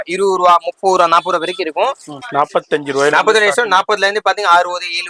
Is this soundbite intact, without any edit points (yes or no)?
no